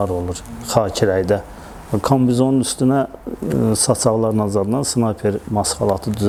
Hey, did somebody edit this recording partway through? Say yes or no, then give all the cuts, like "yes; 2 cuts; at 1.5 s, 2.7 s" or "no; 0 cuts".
no; 0 cuts